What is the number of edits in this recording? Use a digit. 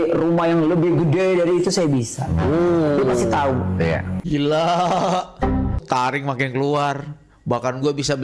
2